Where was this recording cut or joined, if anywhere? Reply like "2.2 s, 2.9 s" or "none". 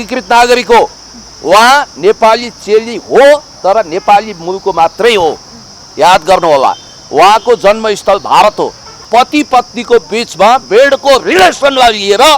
9.1 s